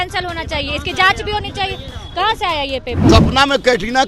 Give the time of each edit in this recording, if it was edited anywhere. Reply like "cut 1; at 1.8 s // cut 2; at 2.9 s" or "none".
cut 1; at 3.0 s